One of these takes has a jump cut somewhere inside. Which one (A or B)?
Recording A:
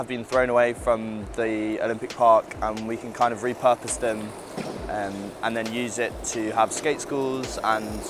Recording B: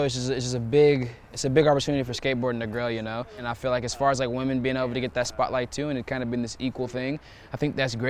B